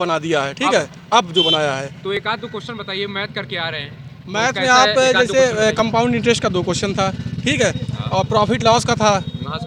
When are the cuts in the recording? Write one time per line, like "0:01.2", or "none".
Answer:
none